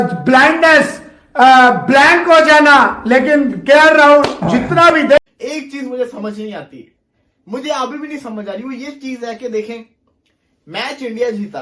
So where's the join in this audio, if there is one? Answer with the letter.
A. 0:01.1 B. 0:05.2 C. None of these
B